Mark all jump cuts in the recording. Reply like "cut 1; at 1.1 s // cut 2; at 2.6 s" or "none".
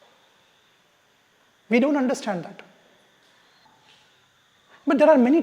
cut 1; at 3.7 s

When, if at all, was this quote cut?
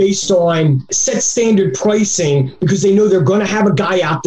none

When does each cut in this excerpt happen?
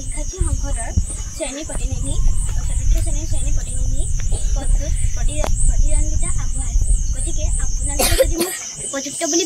none

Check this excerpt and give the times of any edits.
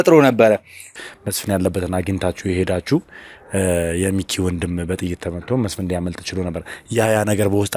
cut 1; at 0.9 s

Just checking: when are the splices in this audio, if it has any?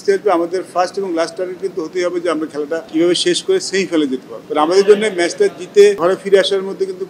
cut 1; at 2.9 s // cut 2; at 4.3 s // cut 3; at 6.0 s

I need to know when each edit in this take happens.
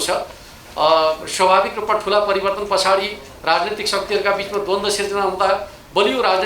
none

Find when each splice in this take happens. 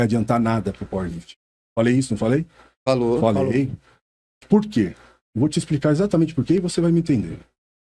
none

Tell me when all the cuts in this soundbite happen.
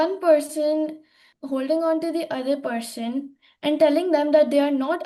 cut 1; at 1.3 s

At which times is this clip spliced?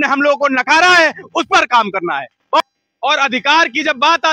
cut 1; at 2.8 s

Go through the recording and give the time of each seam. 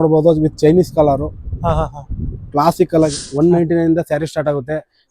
cut 1; at 3.2 s

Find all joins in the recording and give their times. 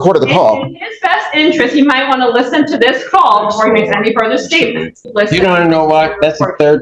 cut 1; at 5.1 s

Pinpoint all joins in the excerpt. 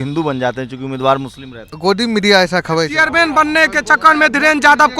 cut 1; at 1.7 s // cut 2; at 2.9 s

